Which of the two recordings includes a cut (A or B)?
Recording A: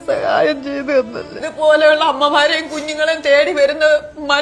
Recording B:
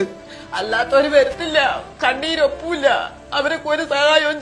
A